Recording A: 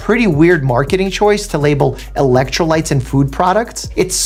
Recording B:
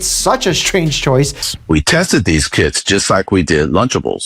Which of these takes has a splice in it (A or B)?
B